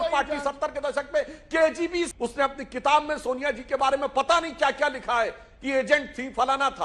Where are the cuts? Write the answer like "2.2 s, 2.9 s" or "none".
2.1 s